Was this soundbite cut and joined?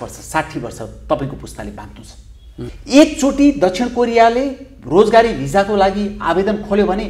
yes; 1 cut; at 2.8 s

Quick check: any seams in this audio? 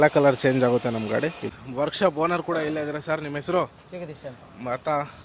yes; 1 cut; at 1.5 s

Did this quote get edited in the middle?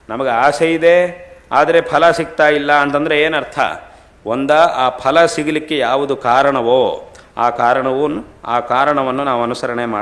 no; 0 cuts

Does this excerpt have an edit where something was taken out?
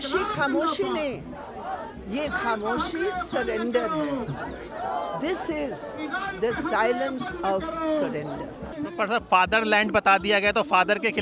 yes; 1 cut; at 8.7 s

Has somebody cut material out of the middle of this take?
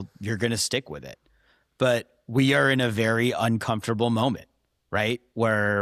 no; 0 cuts

